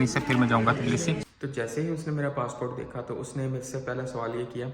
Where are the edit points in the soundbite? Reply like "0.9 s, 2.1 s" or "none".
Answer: 1.2 s